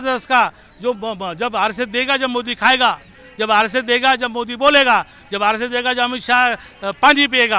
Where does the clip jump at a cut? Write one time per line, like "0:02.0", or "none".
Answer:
none